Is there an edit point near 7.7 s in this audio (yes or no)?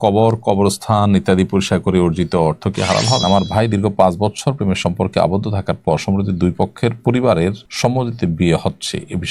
yes